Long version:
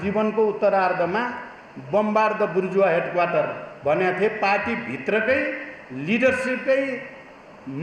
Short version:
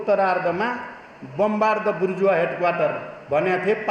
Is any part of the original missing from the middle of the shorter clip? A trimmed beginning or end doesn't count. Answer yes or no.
no